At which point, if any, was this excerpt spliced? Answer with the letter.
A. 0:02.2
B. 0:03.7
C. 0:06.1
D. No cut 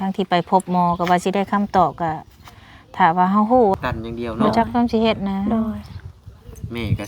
B